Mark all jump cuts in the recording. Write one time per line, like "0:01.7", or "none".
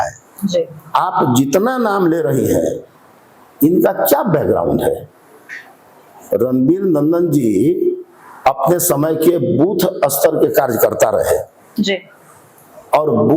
none